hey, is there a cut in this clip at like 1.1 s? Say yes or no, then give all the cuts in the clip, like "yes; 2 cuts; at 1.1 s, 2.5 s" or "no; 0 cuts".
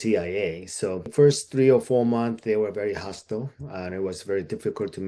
yes; 1 cut; at 1.1 s